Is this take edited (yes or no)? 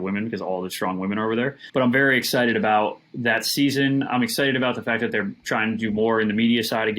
yes